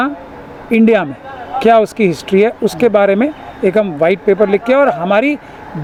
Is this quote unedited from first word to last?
yes; 0 cuts

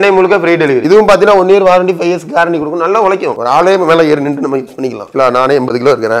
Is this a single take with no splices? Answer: yes; 0 cuts

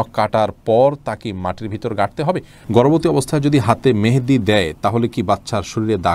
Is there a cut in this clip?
yes; 1 cut; at 2.5 s

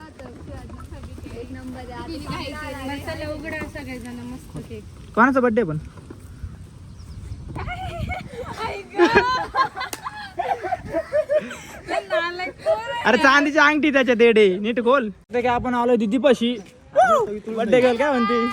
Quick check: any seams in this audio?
yes; 1 cut; at 15.3 s

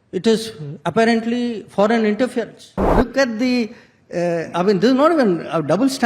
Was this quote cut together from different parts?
yes; 1 cut; at 2.9 s

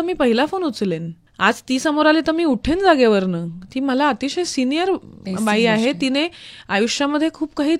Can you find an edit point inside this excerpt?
no; 0 cuts

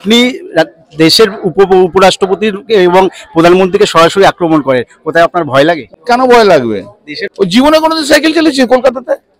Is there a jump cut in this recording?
yes; 2 cuts; at 5.9 s, 7.2 s

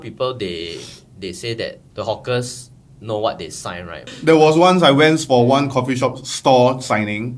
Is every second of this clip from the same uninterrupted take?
no; 1 cut; at 4.1 s

